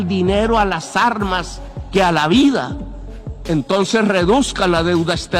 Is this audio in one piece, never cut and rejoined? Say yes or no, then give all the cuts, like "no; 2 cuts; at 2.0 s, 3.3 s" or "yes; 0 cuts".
yes; 0 cuts